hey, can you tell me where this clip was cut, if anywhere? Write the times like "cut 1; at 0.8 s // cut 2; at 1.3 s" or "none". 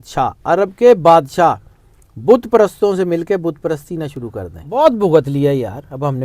cut 1; at 4.5 s